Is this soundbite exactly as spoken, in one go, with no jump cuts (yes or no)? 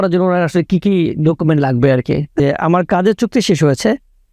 no